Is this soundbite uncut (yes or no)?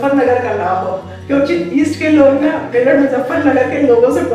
yes